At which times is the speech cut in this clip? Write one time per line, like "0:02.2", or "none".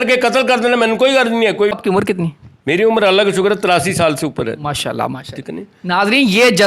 0:01.8